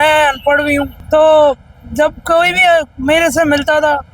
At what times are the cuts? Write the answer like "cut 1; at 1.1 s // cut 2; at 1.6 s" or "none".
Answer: cut 1; at 1.0 s